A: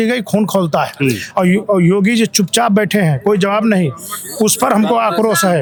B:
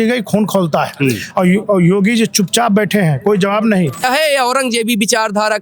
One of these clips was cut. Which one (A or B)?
B